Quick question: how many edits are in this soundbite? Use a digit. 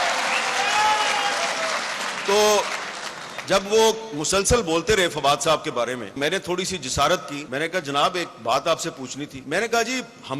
3